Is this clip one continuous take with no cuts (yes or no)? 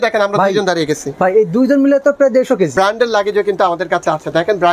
no